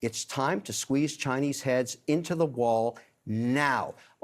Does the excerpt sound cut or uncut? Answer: uncut